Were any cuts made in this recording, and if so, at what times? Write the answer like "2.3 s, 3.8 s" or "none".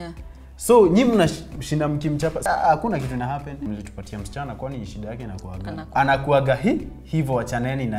2.4 s, 3.6 s, 5.8 s